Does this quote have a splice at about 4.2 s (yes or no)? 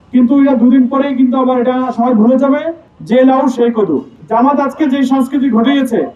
no